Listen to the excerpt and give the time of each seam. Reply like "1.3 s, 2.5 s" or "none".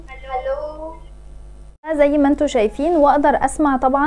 1.8 s